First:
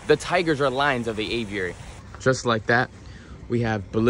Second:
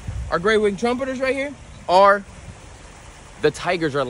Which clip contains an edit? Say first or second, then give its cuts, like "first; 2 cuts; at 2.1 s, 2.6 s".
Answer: first; 1 cut; at 1.9 s